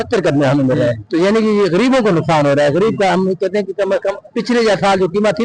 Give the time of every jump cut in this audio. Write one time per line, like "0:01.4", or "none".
0:01.0
0:04.3